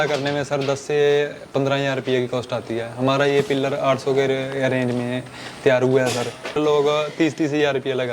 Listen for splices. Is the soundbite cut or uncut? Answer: cut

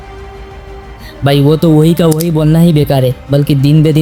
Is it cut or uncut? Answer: uncut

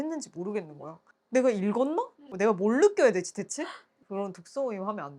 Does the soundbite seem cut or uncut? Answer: cut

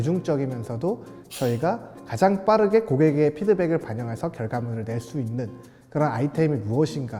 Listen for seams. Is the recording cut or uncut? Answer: uncut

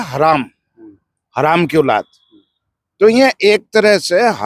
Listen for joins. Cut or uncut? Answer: uncut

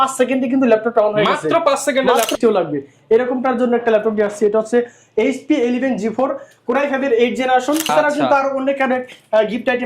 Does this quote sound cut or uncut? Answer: cut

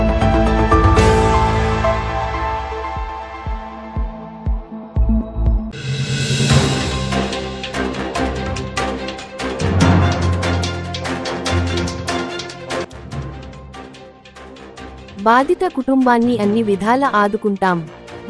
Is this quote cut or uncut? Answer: cut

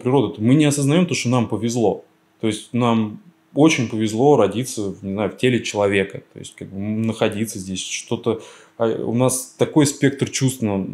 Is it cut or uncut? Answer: uncut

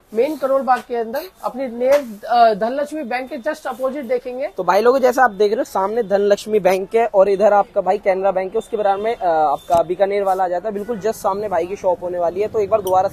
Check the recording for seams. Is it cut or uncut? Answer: uncut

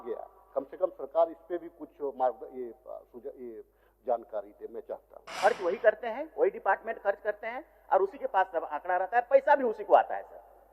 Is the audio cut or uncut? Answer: cut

